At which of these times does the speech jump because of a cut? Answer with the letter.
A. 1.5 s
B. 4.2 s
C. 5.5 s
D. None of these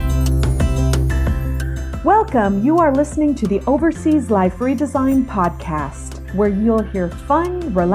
A